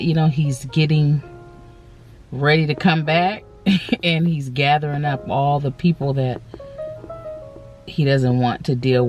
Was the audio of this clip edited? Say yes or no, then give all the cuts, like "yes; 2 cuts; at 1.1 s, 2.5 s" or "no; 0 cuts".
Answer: no; 0 cuts